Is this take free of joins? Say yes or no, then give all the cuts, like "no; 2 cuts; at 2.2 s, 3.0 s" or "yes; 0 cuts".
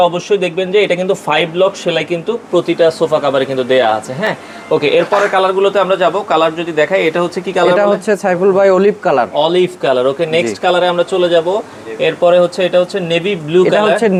yes; 0 cuts